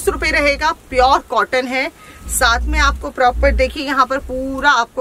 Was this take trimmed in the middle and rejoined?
no; 0 cuts

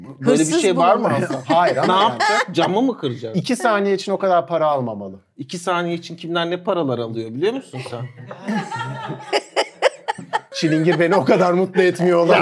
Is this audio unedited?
no; 1 cut; at 10.5 s

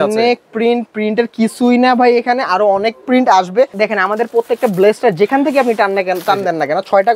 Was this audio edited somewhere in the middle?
yes; 1 cut; at 3.7 s

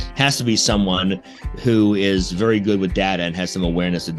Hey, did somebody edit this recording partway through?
no; 0 cuts

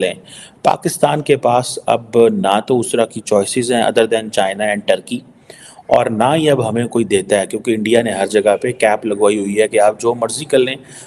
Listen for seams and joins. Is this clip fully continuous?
yes; 0 cuts

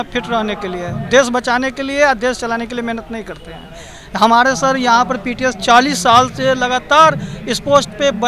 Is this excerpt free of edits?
yes; 0 cuts

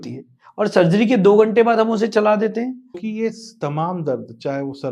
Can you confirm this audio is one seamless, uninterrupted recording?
no; 1 cut; at 3.0 s

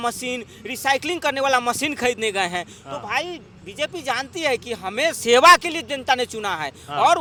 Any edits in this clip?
no; 0 cuts

